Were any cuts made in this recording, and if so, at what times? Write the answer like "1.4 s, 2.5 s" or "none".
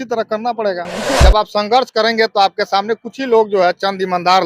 1.0 s